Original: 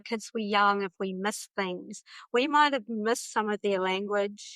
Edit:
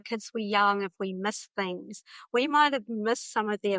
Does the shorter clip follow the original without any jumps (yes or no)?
yes